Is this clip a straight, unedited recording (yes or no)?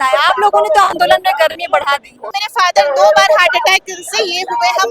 no